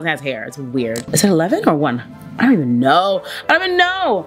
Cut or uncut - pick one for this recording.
cut